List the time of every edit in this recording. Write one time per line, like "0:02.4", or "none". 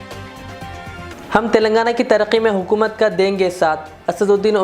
0:01.1